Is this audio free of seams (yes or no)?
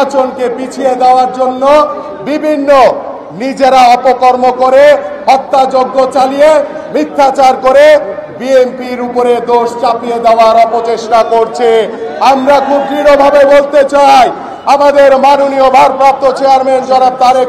yes